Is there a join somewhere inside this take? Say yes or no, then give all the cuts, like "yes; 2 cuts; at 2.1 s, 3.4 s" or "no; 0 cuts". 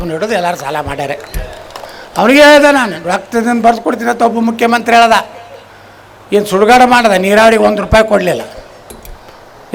no; 0 cuts